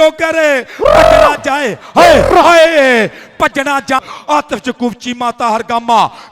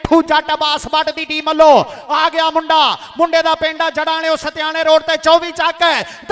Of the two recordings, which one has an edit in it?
first; 1 cut; at 4.0 s

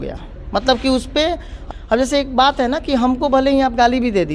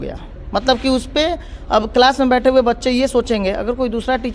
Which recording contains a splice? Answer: first; 1 cut; at 1.5 s

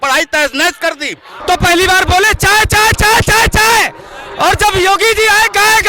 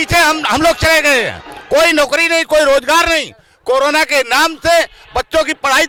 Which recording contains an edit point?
first; 1 cut; at 1.3 s

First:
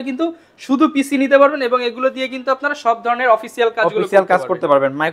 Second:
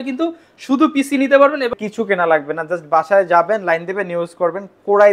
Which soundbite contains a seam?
second; 1 cut; at 1.7 s

